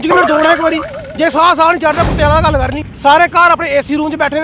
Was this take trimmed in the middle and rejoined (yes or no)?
yes